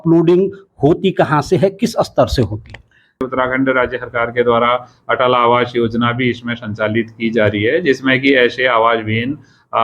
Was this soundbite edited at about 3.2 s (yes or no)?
yes